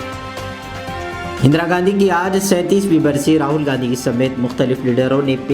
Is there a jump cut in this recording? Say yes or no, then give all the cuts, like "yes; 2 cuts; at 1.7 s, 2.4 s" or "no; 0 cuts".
yes; 1 cut; at 1.3 s